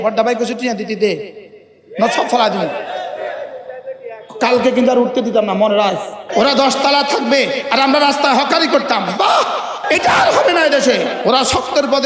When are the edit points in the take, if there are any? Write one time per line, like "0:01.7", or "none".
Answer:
0:06.3
0:09.8
0:11.1